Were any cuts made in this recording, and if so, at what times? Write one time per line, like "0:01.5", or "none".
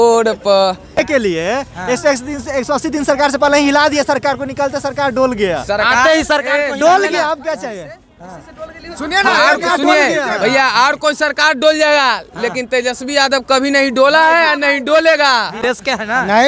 0:01.0
0:15.5